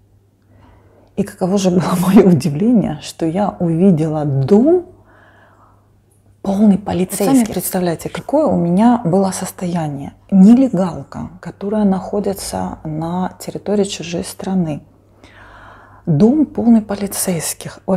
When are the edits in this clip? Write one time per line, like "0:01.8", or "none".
0:07.3